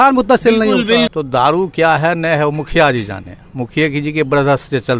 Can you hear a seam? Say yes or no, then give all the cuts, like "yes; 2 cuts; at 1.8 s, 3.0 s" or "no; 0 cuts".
yes; 1 cut; at 1.1 s